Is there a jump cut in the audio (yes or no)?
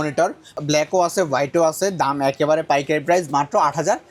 no